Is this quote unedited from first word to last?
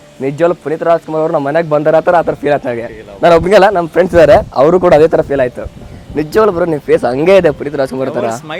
yes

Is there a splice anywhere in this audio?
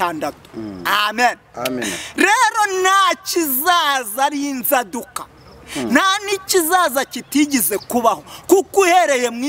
no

